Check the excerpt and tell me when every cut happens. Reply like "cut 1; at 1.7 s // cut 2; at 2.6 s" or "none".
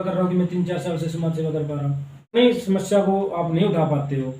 cut 1; at 2.4 s

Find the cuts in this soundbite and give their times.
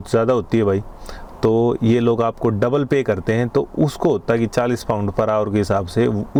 none

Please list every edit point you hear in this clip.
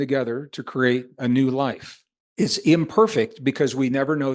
none

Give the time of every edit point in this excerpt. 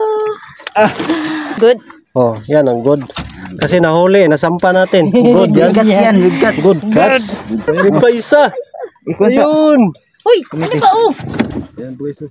cut 1; at 1.6 s // cut 2; at 7.7 s // cut 3; at 11.5 s

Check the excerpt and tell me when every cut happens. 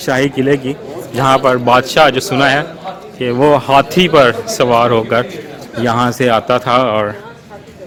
none

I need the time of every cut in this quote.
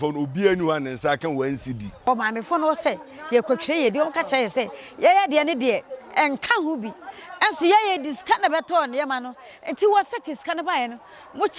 cut 1; at 2.0 s

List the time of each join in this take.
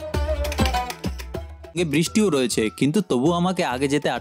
cut 1; at 1.8 s

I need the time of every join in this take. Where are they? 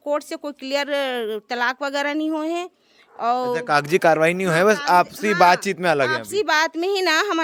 none

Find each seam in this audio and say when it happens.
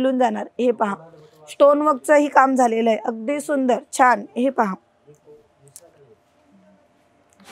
none

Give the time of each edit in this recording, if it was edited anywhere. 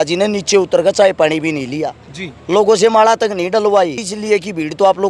cut 1; at 4.1 s

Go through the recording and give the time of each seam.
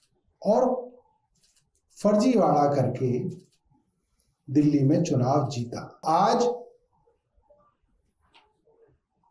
cut 1; at 6.0 s

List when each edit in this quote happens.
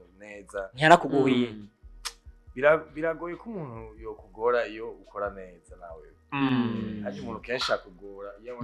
none

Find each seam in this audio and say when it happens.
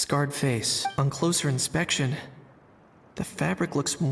cut 1; at 1.0 s

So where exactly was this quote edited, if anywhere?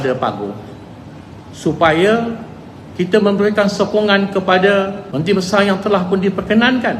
cut 1; at 5.0 s

